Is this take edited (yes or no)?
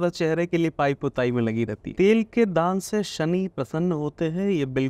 yes